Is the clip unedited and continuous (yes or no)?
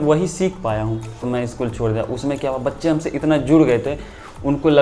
no